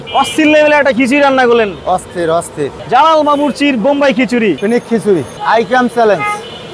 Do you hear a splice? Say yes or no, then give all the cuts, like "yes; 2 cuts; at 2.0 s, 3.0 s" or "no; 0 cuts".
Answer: no; 0 cuts